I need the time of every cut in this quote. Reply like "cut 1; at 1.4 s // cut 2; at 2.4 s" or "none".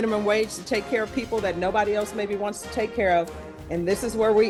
none